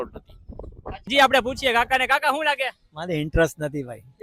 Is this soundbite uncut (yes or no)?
no